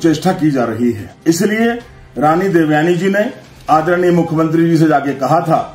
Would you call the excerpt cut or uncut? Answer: cut